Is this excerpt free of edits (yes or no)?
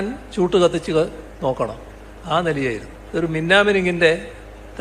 no